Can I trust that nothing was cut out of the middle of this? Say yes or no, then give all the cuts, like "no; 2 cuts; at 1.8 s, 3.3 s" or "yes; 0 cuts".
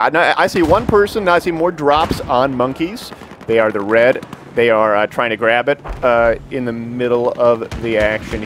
no; 1 cut; at 6.9 s